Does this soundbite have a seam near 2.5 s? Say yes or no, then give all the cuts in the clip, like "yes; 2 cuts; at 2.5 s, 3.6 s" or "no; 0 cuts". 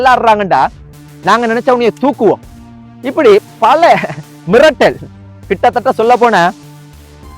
no; 1 cut; at 1.0 s